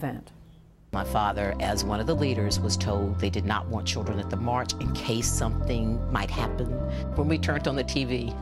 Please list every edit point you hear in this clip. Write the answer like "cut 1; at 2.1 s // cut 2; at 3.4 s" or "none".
cut 1; at 3.0 s